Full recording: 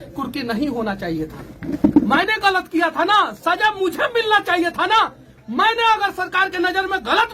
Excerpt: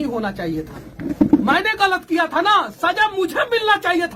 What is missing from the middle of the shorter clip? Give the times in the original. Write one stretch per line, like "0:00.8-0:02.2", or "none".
none